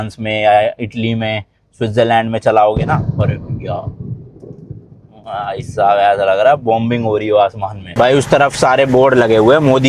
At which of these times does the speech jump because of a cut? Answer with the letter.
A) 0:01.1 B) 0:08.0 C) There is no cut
B